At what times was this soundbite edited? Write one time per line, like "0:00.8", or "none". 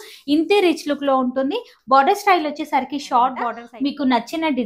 0:03.6